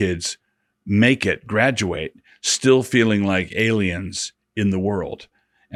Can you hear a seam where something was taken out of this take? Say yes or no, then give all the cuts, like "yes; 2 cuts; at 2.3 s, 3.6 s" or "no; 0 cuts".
no; 0 cuts